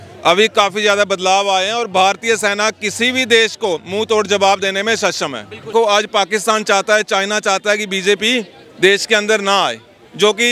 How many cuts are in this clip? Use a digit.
1